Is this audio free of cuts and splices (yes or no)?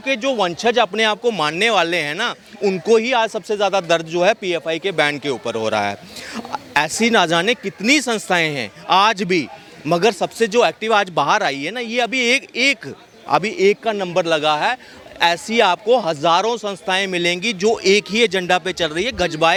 yes